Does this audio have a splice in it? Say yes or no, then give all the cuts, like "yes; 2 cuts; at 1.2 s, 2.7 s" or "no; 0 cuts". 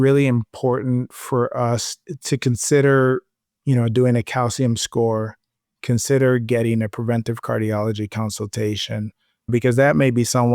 yes; 1 cut; at 9.5 s